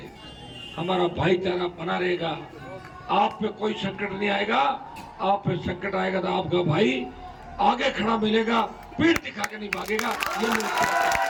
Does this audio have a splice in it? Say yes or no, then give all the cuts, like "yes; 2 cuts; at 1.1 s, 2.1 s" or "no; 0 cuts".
no; 0 cuts